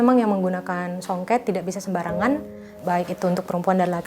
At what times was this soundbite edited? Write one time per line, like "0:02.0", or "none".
0:02.7